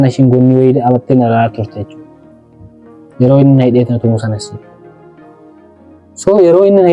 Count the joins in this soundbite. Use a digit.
0